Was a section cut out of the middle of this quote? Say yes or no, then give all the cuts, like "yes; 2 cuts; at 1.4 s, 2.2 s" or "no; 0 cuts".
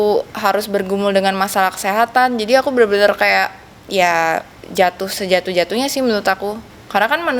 no; 0 cuts